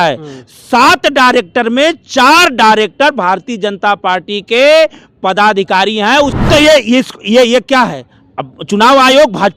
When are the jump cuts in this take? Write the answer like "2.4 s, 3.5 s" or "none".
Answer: 6.4 s